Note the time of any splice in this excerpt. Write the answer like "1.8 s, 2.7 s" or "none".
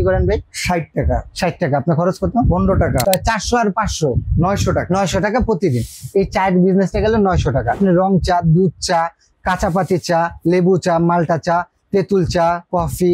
3.0 s, 7.8 s